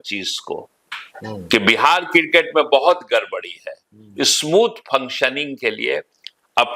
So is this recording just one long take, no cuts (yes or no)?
yes